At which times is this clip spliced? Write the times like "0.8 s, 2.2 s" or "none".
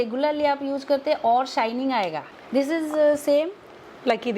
2.3 s